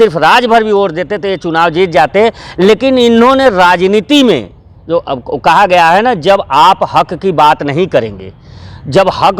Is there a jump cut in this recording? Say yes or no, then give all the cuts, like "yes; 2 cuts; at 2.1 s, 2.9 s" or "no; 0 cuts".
no; 0 cuts